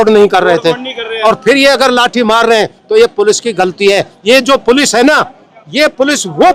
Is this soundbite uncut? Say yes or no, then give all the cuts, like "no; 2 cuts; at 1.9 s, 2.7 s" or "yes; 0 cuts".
yes; 0 cuts